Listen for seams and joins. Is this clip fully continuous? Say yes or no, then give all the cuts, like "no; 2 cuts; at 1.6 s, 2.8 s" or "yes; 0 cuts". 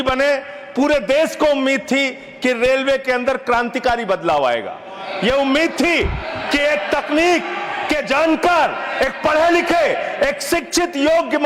yes; 0 cuts